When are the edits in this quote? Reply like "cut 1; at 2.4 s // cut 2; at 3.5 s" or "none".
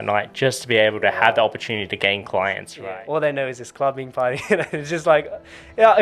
cut 1; at 2.7 s